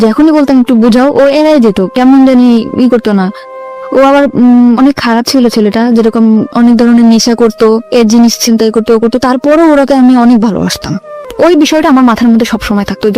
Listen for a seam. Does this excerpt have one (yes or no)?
yes